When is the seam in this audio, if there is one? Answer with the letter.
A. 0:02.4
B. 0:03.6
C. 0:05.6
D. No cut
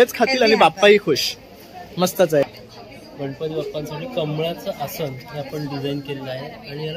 A